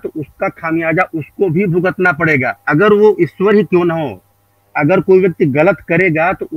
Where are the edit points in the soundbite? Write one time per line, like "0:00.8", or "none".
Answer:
none